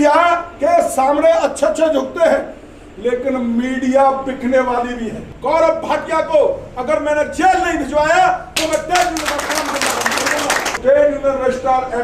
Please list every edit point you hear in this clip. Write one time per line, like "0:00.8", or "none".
0:05.3
0:10.8

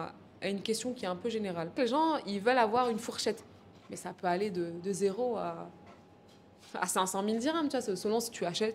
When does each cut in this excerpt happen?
0:01.8

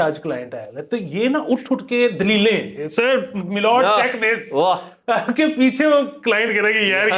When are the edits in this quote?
none

